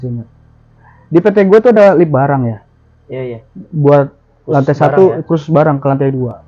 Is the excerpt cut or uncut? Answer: uncut